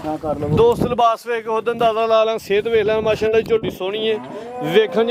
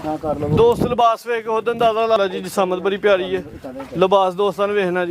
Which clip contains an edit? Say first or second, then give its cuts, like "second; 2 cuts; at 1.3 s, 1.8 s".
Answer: second; 1 cut; at 2.2 s